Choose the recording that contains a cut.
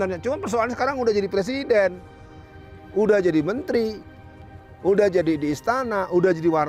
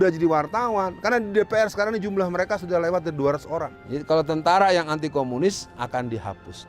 second; 1 cut; at 3.8 s

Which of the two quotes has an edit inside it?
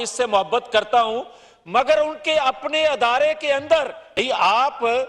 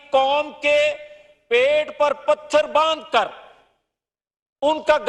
first; 1 cut; at 4.0 s

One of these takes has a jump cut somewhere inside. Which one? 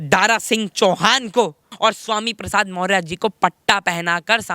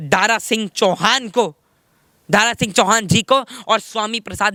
first; 1 cut; at 1.7 s

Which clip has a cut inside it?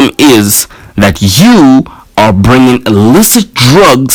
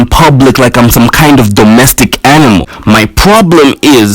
second; 1 cut; at 2.7 s

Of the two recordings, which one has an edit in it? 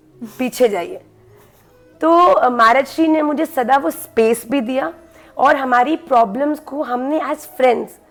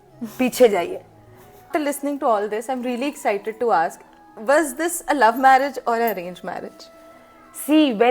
second; 1 cut; at 1.7 s

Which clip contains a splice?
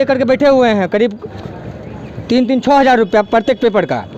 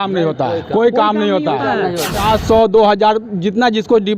second; 1 cut; at 2.2 s

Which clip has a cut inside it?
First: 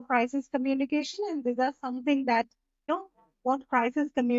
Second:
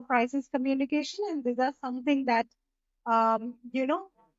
first; 1 cut; at 2.9 s

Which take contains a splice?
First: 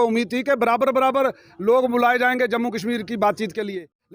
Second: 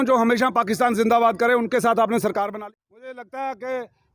second; 1 cut; at 2.5 s

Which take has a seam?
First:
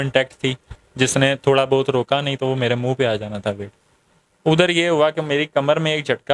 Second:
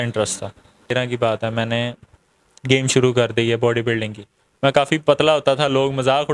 second; 1 cut; at 0.9 s

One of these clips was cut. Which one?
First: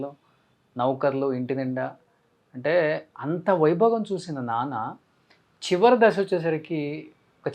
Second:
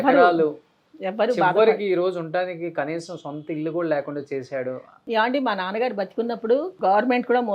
second; 2 cuts; at 4.9 s, 6.7 s

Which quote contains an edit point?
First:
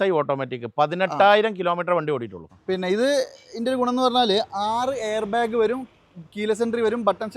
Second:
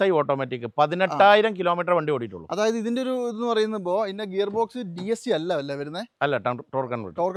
first; 1 cut; at 2.4 s

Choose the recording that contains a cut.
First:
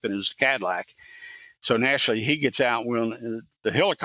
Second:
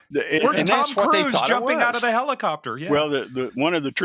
second; 1 cut; at 2.9 s

